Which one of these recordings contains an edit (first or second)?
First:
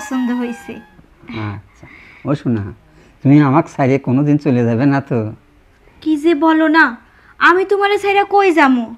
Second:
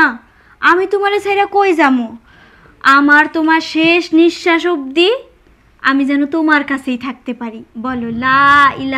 second